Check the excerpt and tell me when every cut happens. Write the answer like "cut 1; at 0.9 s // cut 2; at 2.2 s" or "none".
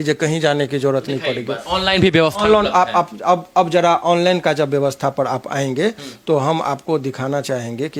none